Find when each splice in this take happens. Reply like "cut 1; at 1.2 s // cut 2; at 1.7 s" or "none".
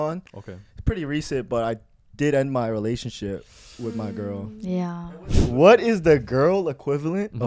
cut 1; at 4.9 s